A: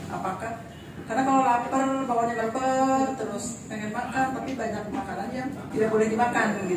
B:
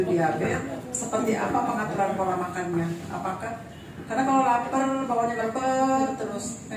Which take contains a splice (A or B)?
A